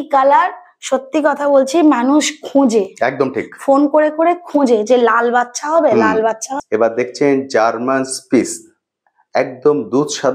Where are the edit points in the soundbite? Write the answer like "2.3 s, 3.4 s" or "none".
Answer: 6.5 s